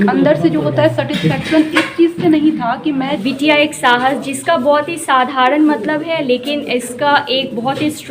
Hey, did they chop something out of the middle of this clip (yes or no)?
yes